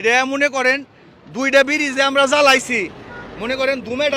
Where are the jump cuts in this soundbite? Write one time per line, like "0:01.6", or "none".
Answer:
none